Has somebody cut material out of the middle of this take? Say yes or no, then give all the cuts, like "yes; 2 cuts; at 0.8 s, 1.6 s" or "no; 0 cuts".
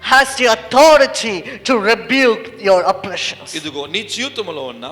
no; 0 cuts